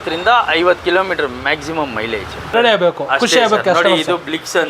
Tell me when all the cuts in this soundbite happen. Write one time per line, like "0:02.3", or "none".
0:02.5